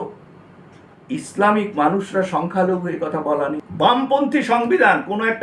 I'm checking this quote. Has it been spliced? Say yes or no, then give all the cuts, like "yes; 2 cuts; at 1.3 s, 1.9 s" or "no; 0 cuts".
yes; 1 cut; at 3.6 s